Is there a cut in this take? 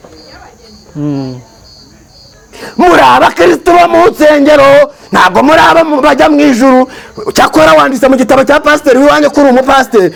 no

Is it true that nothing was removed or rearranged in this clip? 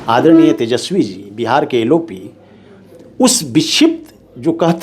yes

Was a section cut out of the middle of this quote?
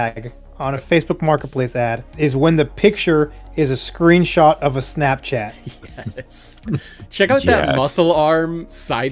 yes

